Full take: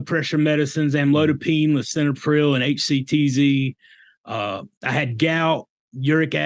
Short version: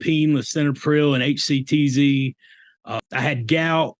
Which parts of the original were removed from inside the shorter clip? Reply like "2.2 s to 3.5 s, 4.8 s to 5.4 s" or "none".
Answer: 4.4 s to 4.7 s